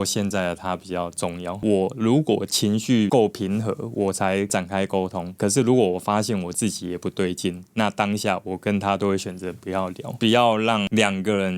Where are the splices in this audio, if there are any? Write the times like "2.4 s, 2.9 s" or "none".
1.5 s, 10.2 s